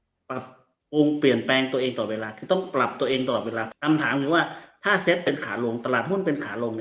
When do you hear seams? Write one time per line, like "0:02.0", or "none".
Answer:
0:03.7